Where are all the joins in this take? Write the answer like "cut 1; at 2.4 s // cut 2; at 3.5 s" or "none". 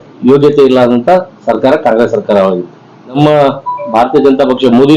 cut 1; at 3.2 s